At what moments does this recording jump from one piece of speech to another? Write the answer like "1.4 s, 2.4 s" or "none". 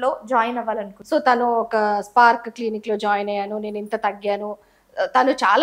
1.0 s